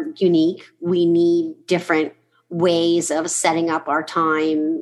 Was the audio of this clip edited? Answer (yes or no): no